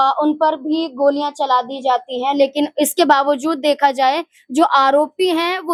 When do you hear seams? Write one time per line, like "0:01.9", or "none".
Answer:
none